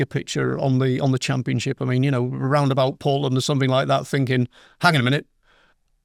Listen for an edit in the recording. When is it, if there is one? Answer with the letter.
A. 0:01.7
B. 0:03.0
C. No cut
C